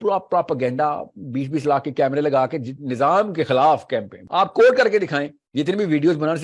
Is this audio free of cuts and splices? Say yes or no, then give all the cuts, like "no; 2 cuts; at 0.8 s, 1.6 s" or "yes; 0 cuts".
no; 2 cuts; at 4.2 s, 5.4 s